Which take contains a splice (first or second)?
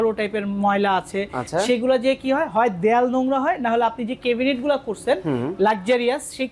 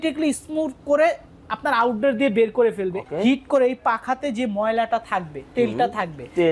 second